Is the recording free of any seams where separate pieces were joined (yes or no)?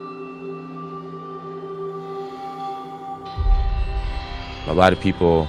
no